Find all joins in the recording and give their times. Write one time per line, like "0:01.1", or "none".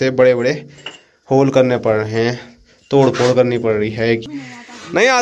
0:04.2